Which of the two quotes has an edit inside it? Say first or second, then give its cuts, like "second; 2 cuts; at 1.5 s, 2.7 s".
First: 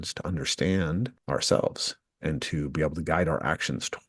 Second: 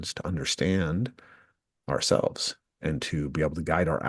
first; 1 cut; at 1.2 s